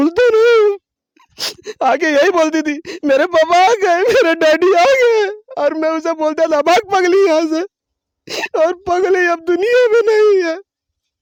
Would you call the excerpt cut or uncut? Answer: uncut